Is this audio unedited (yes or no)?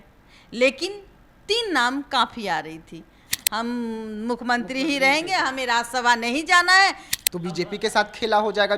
no